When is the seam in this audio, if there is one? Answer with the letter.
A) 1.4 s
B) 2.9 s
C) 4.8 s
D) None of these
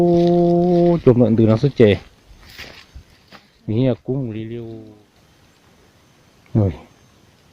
C